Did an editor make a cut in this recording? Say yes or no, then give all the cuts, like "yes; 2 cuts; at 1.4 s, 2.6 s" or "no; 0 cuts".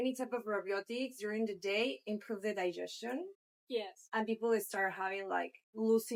no; 0 cuts